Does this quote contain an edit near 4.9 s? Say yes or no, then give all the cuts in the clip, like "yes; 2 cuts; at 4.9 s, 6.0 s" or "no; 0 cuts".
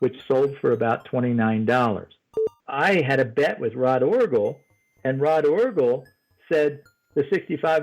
no; 1 cut; at 2.5 s